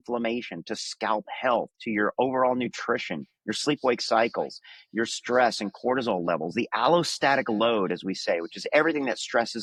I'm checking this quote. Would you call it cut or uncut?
uncut